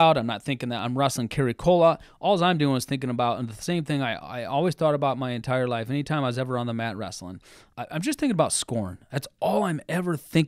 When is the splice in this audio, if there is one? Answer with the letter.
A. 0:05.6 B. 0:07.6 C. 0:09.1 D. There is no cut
B